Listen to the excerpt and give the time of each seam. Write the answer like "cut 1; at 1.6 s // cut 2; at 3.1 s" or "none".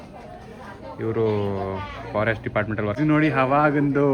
cut 1; at 3.0 s